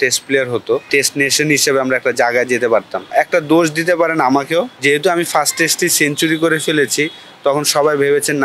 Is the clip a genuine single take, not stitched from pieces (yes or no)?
no